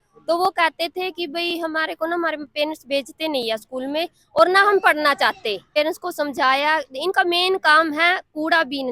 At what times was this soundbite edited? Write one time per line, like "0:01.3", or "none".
0:05.7

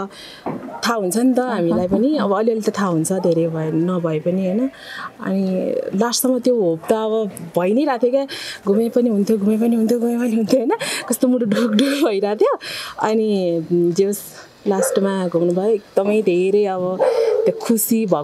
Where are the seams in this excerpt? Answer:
none

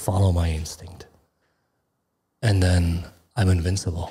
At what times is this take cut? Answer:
none

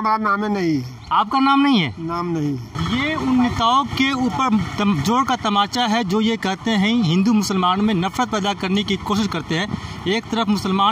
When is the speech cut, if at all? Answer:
0:02.7

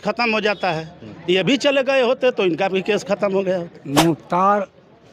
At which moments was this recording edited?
0:03.8

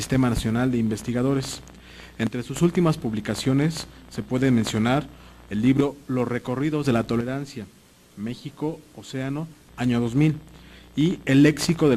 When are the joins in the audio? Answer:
0:10.5

